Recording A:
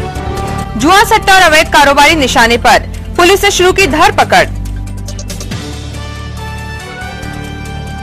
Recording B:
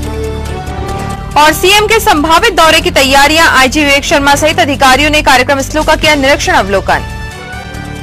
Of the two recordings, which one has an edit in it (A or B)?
B